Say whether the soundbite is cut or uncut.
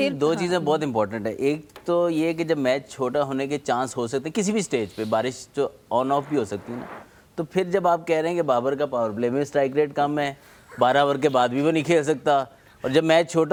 uncut